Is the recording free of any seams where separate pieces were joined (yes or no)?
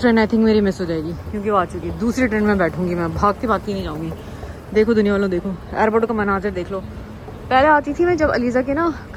yes